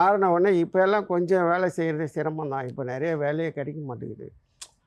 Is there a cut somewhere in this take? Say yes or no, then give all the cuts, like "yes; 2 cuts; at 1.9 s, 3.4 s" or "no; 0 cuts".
no; 0 cuts